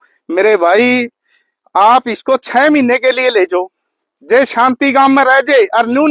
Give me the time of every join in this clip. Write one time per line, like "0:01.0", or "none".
none